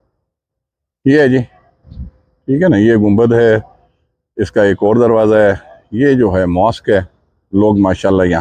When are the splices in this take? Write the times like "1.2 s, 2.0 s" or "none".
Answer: none

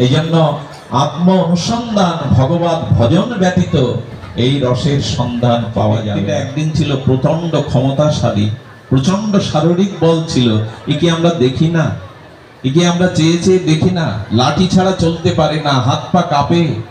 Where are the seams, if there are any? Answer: 6.3 s

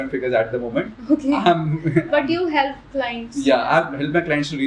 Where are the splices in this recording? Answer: none

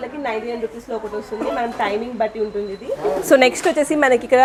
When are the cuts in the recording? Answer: none

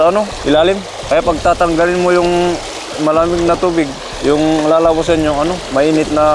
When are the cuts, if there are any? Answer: none

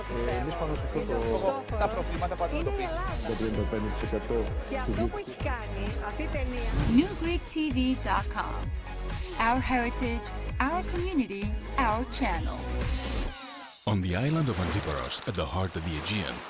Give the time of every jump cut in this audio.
13.8 s

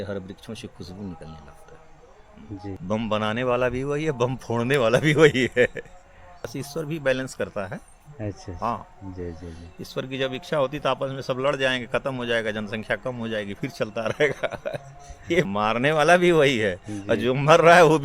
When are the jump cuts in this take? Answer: 2.8 s, 6.4 s, 15.5 s

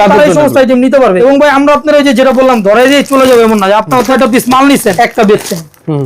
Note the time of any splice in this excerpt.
1.2 s, 4.1 s, 4.9 s

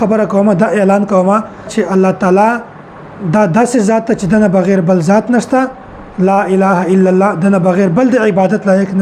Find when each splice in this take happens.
1.7 s

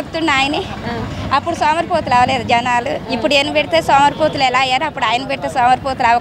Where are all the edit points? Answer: none

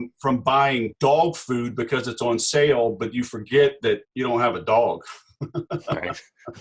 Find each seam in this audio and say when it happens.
0.9 s, 4.1 s

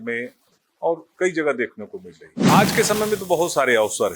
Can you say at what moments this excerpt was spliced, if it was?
2.5 s

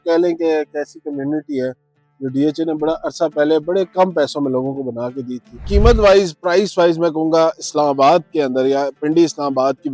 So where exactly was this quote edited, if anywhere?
5.7 s

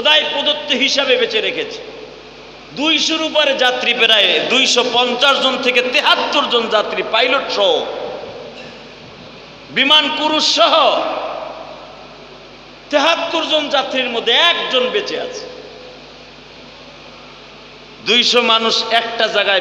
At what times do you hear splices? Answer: none

